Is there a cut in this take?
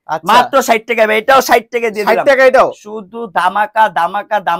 no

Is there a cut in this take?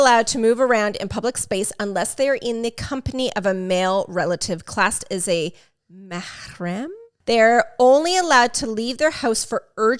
yes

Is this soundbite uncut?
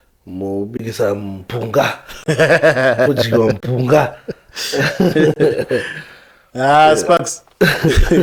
yes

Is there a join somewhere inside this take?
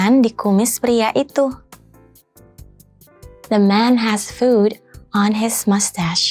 no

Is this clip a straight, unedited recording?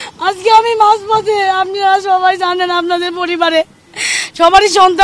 yes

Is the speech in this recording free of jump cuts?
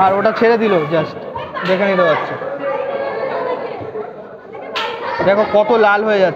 yes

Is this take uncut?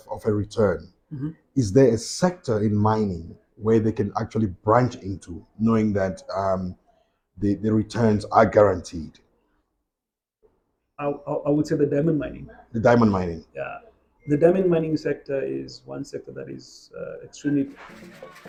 yes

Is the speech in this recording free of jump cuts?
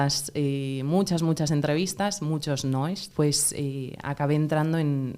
no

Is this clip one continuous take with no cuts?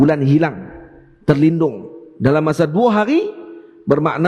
yes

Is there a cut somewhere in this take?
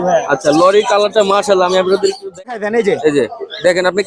yes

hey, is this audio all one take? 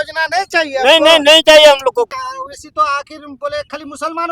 no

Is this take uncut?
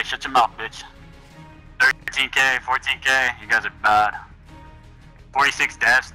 yes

